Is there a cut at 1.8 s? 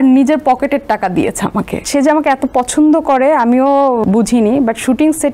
yes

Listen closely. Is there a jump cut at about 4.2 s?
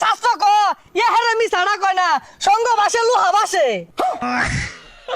yes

